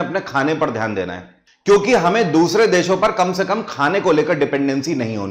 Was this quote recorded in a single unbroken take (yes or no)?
yes